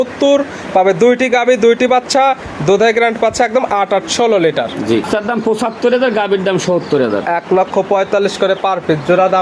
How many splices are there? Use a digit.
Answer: 1